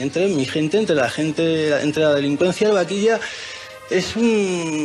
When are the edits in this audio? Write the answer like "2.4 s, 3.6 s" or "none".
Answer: none